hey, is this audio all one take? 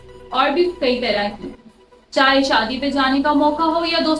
yes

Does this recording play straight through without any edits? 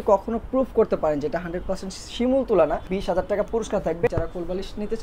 no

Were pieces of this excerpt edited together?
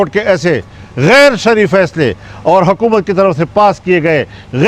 no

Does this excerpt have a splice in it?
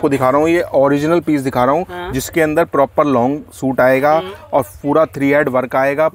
no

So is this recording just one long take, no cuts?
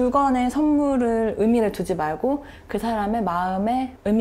yes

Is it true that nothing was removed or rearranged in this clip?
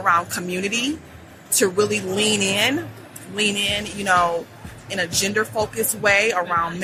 yes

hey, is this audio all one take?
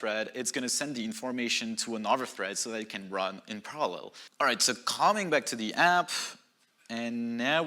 no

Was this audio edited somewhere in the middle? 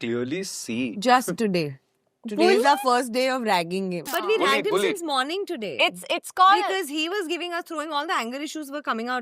yes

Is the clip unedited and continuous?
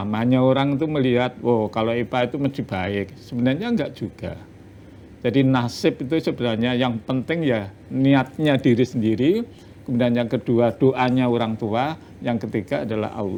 yes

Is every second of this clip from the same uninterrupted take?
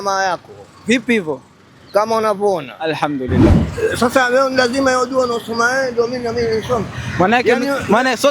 no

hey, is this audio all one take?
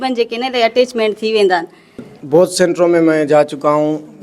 no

